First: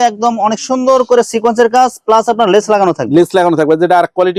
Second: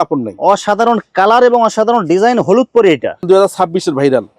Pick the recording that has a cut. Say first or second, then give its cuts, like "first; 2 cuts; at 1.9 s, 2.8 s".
second; 1 cut; at 3.2 s